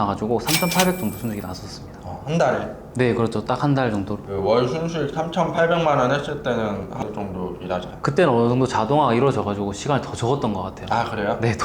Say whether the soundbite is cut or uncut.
cut